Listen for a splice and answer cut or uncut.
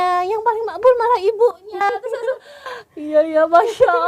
uncut